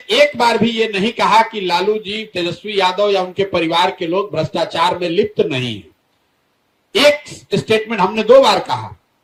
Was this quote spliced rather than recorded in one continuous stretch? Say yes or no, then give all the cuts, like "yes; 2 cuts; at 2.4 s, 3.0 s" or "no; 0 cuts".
no; 0 cuts